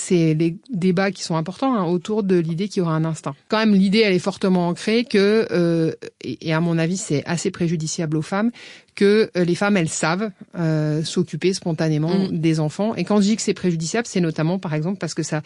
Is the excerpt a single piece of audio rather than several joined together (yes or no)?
no